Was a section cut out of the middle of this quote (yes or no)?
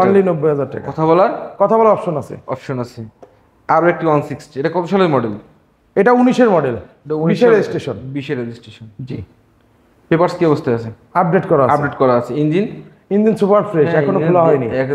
no